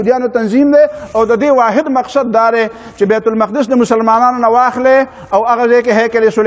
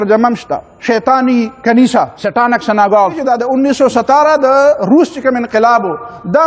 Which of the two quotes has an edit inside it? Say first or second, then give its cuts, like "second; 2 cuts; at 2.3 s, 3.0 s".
second; 2 cuts; at 2.2 s, 3.2 s